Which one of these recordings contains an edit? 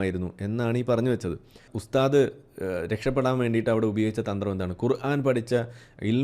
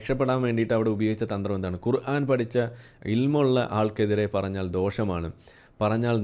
first; 1 cut; at 1.7 s

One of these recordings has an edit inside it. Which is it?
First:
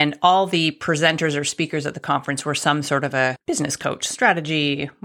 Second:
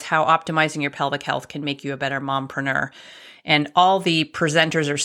first; 1 cut; at 3.4 s

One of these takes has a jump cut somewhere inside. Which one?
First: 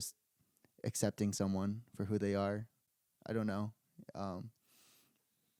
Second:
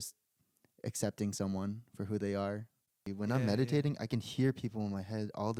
second; 1 cut; at 3.1 s

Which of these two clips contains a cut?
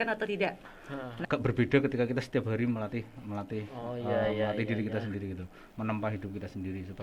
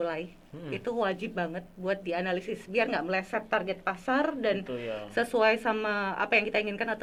first; 1 cut; at 1.2 s

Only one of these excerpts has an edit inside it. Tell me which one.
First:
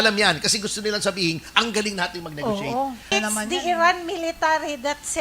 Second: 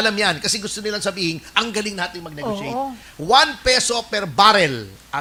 first; 1 cut; at 3.1 s

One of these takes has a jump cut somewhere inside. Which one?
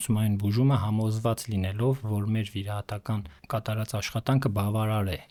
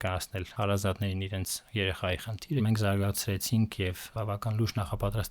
second; 2 cuts; at 2.6 s, 4.0 s

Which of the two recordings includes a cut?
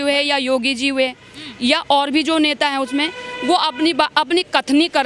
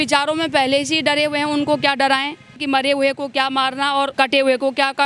second; 2 cuts; at 2.6 s, 4.1 s

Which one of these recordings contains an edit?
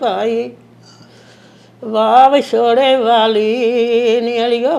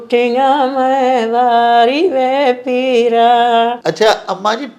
second; 1 cut; at 3.8 s

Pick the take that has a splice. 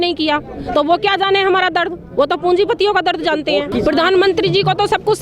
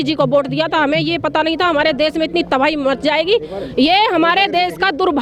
first; 1 cut; at 3.7 s

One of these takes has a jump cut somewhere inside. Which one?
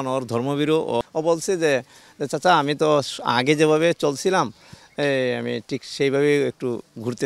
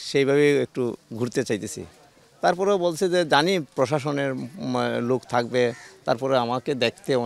first; 1 cut; at 1.0 s

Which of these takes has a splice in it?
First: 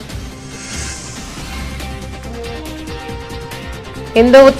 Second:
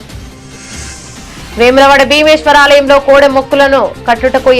second; 1 cut; at 1.5 s

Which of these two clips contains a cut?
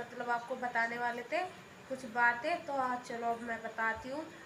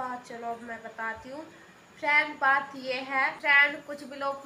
second; 1 cut; at 3.4 s

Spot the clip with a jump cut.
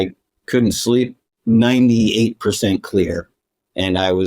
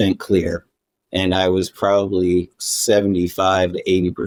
first; 1 cut; at 1.3 s

